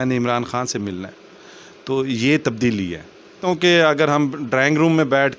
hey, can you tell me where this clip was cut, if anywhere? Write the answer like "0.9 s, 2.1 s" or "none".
3.4 s